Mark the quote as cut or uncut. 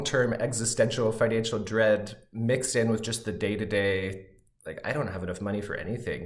uncut